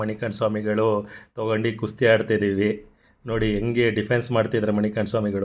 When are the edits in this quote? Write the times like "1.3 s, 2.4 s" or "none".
none